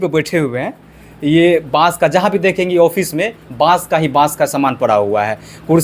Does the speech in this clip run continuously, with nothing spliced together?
yes; 0 cuts

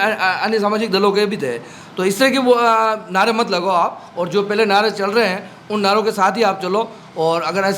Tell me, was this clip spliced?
no; 0 cuts

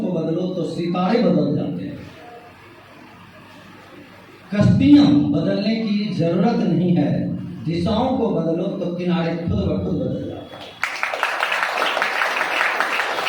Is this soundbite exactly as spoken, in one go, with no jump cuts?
yes; 0 cuts

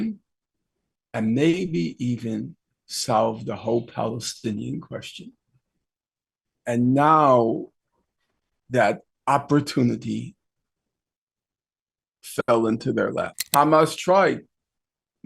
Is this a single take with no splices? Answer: no; 1 cut; at 13.4 s

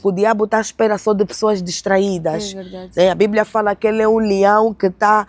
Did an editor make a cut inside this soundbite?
no; 0 cuts

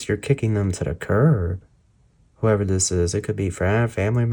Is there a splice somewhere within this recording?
no; 0 cuts

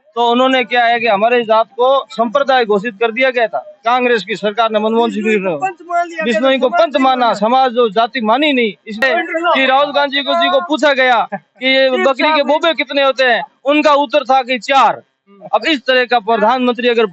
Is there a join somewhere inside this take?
yes; 1 cut; at 9.0 s

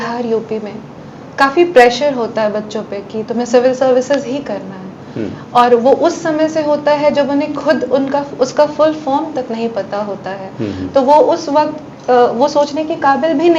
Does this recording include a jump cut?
no; 0 cuts

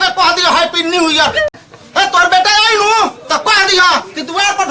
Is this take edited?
yes; 1 cut; at 1.5 s

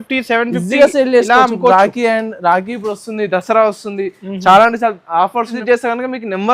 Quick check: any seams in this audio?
yes; 1 cut; at 5.5 s

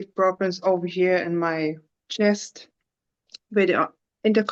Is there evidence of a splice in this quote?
no; 0 cuts

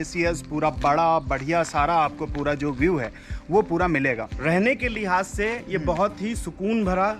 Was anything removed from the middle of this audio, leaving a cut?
yes; 1 cut; at 4.3 s

